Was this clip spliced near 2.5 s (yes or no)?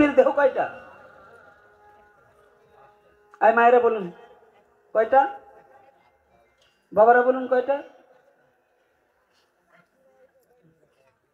no